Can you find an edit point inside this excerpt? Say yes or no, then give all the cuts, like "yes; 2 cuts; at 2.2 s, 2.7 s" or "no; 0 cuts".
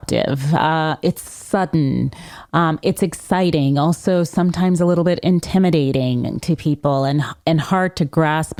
no; 0 cuts